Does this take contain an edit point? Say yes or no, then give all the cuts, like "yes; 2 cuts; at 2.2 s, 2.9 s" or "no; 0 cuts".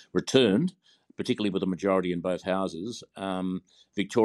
no; 0 cuts